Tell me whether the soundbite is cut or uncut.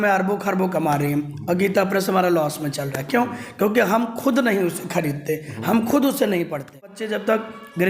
cut